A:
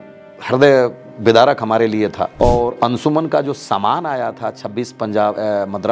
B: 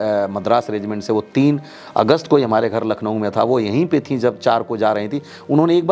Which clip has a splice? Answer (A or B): A